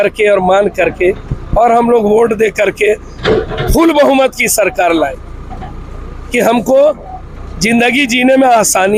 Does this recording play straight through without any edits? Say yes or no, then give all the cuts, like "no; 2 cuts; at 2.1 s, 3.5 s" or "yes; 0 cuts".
yes; 0 cuts